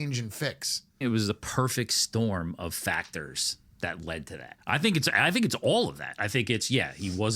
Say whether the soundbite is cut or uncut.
cut